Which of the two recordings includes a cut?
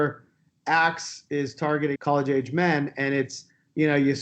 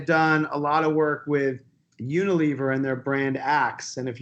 first; 1 cut; at 1.9 s

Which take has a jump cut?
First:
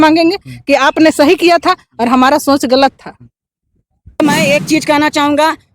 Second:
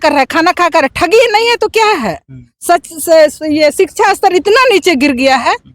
first; 1 cut; at 4.2 s

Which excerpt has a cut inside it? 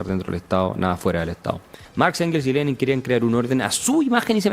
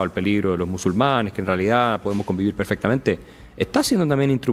first; 1 cut; at 1.8 s

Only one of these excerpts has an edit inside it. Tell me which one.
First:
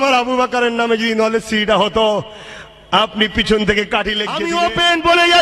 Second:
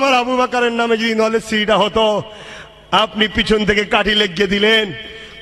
first; 1 cut; at 4.3 s

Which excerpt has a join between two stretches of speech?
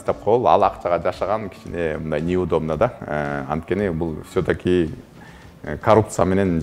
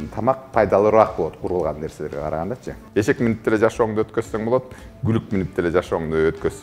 second; 1 cut; at 2.7 s

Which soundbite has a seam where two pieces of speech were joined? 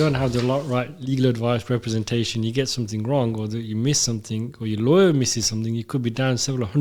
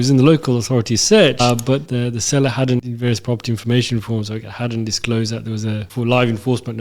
second; 3 cuts; at 1.4 s, 2.8 s, 5.9 s

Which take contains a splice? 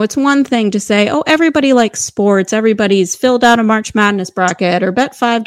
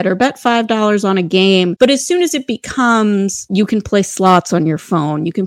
second; 2 cuts; at 1.7 s, 3.5 s

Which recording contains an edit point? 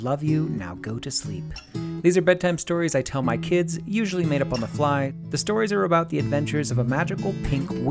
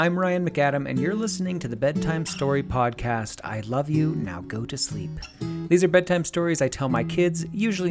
first; 1 cut; at 5.2 s

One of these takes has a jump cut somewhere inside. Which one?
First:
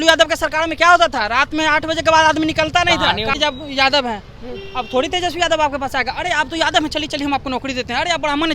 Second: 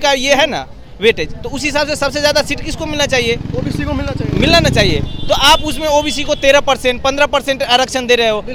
first; 1 cut; at 3.3 s

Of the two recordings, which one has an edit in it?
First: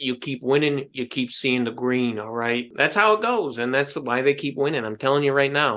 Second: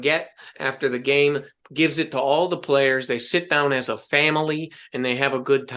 first; 1 cut; at 2.7 s

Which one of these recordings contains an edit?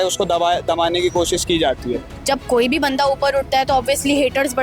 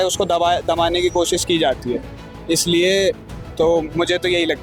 first; 1 cut; at 2.1 s

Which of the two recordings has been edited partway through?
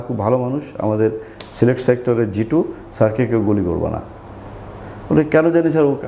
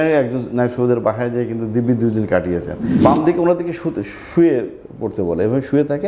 second; 1 cut; at 3.0 s

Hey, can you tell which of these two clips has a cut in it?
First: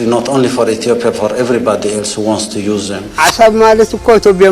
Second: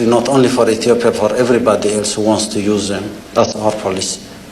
first; 1 cut; at 3.1 s

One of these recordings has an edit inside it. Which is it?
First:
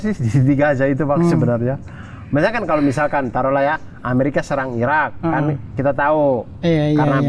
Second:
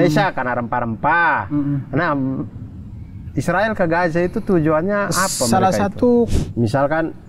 second; 1 cut; at 6.3 s

